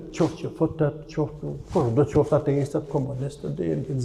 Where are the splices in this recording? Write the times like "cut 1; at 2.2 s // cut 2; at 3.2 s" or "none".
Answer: none